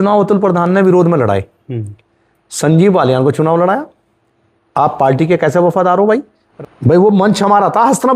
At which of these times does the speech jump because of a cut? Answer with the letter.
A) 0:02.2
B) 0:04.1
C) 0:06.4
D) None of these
C